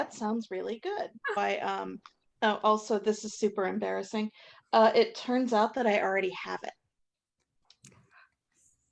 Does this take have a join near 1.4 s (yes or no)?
yes